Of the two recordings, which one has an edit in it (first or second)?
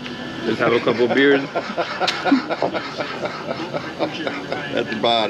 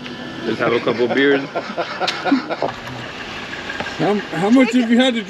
second